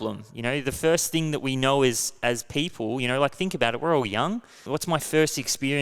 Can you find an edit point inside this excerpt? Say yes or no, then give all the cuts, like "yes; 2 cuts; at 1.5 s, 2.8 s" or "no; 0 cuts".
yes; 1 cut; at 4.6 s